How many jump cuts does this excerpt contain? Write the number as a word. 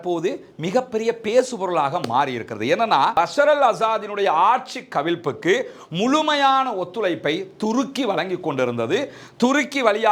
one